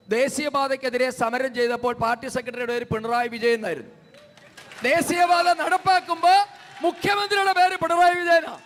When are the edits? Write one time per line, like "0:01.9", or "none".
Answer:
none